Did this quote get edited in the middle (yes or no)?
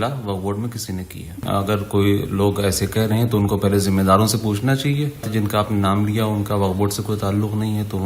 yes